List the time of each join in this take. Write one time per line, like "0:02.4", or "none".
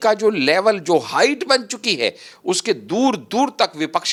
none